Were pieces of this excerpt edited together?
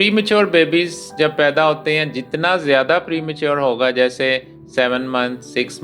no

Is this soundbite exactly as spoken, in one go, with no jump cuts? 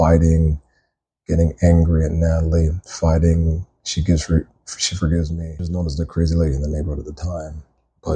no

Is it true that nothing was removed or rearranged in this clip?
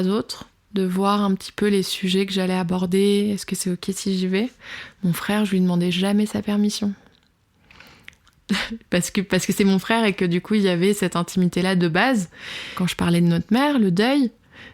no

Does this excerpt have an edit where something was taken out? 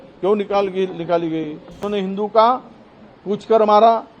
yes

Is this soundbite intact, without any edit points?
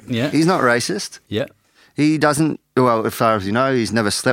no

